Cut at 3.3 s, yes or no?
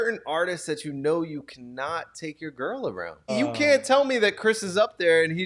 yes